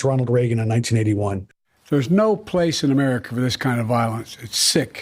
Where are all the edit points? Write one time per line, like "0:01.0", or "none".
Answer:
0:01.7